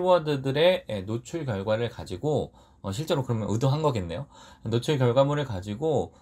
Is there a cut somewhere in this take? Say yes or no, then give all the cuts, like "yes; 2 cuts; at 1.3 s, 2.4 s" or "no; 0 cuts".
no; 0 cuts